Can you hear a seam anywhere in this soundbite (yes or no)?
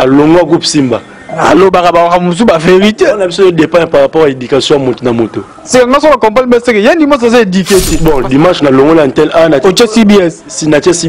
yes